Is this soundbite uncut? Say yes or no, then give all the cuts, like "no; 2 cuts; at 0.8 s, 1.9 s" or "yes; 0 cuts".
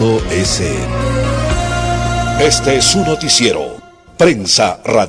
no; 1 cut; at 2.4 s